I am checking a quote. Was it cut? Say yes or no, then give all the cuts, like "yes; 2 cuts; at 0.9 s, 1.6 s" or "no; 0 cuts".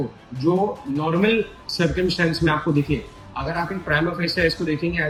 no; 0 cuts